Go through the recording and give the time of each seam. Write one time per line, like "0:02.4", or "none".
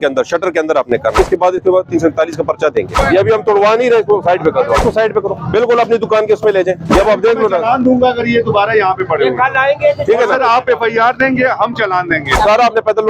0:01.1
0:03.0
0:04.8
0:07.0
0:12.3